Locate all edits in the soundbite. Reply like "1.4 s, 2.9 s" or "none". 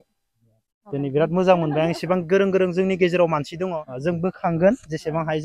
3.8 s